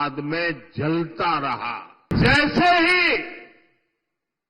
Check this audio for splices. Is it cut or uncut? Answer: cut